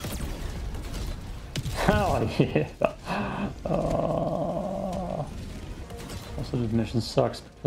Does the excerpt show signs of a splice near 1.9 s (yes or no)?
no